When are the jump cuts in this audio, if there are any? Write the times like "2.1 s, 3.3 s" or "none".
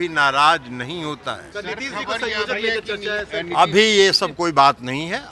1.5 s